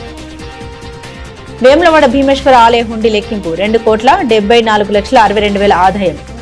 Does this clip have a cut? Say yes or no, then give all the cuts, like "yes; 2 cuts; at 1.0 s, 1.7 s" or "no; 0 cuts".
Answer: yes; 1 cut; at 1.0 s